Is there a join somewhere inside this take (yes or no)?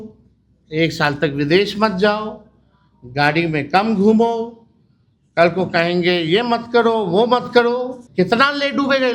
yes